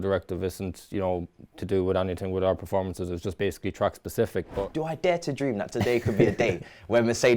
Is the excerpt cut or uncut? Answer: cut